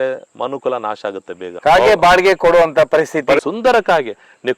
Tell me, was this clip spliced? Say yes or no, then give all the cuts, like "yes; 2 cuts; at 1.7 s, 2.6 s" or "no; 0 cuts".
yes; 2 cuts; at 1.4 s, 3.4 s